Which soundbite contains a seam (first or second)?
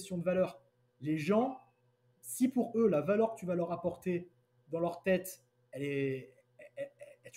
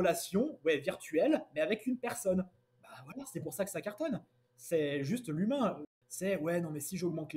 second